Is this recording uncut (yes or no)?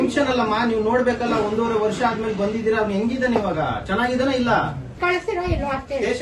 no